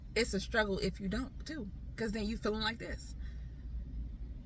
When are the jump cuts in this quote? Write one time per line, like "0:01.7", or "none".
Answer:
none